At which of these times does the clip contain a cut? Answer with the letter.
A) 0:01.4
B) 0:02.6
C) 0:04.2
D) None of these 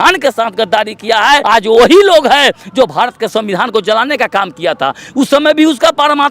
A